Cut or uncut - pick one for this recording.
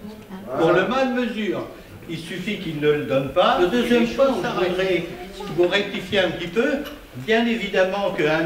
cut